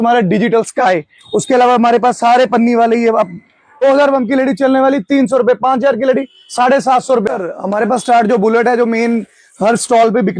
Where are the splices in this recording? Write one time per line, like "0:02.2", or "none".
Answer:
0:03.8
0:07.3